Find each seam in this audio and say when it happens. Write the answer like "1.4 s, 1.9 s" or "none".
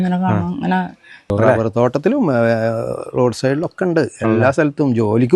1.3 s